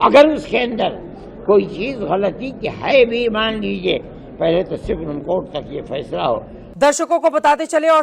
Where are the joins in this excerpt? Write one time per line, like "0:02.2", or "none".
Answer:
0:06.6

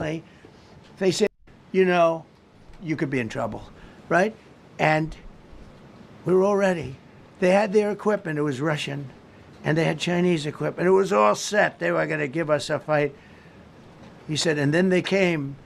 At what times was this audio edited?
0:01.3

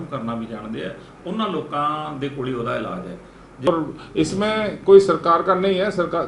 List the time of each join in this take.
0:03.7

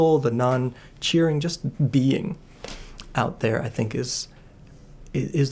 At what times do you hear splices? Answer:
none

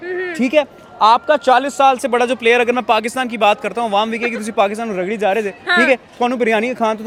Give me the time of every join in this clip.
none

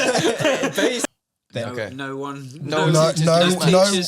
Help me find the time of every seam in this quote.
0:01.0

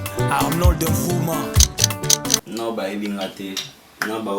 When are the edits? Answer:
0:02.4

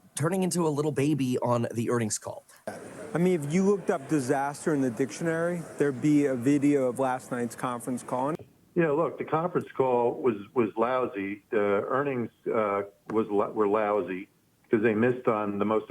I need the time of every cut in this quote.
0:02.6
0:08.3

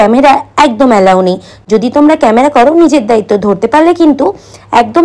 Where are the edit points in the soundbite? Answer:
none

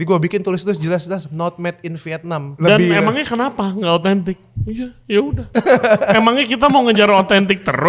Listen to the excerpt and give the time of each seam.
0:02.5
0:05.5

